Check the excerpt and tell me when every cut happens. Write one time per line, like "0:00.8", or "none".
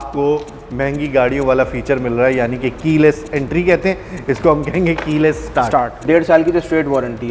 0:06.0